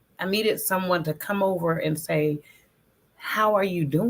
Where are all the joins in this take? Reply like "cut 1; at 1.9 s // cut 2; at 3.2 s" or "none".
none